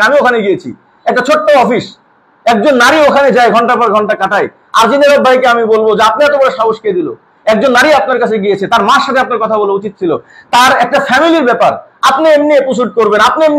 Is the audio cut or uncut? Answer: uncut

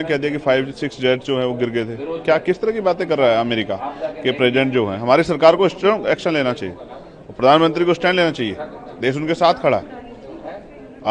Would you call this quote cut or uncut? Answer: uncut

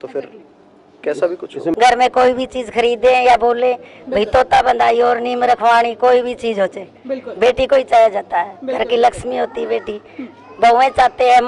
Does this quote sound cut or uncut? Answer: cut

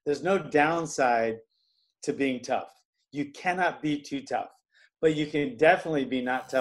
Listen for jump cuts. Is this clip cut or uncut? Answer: uncut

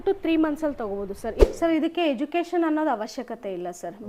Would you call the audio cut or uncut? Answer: cut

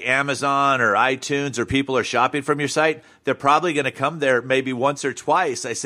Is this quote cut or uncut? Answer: uncut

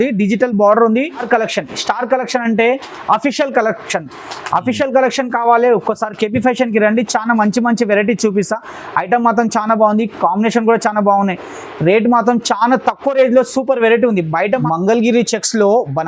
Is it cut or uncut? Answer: cut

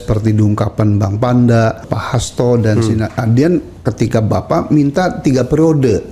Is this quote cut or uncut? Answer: cut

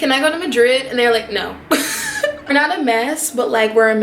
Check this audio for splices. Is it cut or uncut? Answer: cut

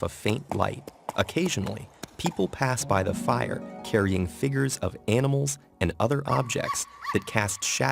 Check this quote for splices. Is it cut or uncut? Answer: cut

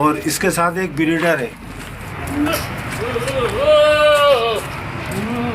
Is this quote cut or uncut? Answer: cut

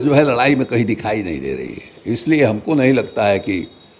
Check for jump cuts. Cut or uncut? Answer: uncut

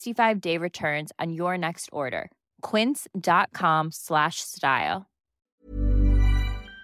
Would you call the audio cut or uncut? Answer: cut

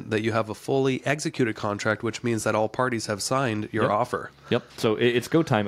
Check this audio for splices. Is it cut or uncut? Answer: cut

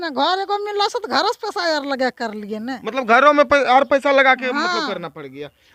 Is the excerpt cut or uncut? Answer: uncut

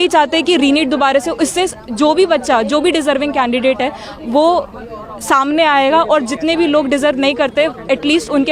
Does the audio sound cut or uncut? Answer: uncut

